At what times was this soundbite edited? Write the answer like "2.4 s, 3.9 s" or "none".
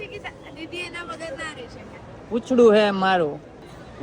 2.2 s